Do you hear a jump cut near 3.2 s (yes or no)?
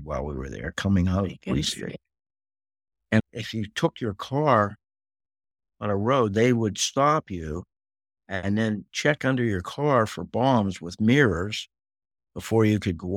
yes